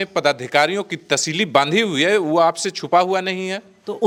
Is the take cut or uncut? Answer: uncut